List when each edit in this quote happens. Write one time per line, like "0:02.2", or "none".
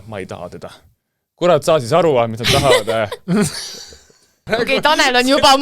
0:04.4